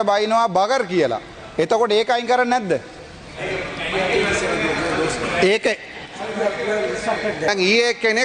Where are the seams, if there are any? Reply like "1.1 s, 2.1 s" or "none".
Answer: none